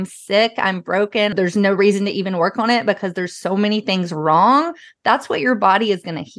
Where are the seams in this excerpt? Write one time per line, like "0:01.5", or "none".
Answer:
0:01.3